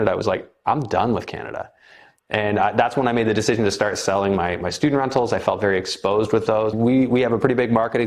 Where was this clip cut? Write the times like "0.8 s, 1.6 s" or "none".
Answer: 6.7 s

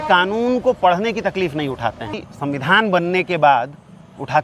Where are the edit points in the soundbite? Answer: 2.1 s

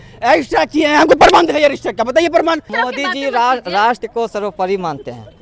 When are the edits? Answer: 2.7 s

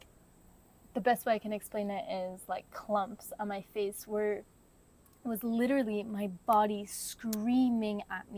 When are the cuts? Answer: none

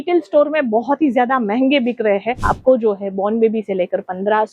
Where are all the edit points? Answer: 2.3 s

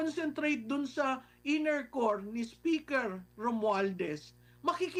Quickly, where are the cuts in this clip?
none

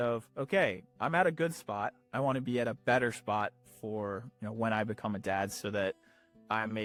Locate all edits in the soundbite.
none

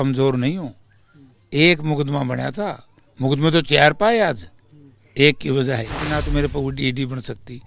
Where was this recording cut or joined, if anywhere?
6.0 s

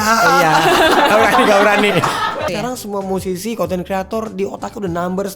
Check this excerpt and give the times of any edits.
2.5 s

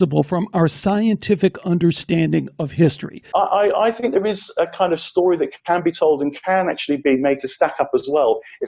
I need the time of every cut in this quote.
3.2 s

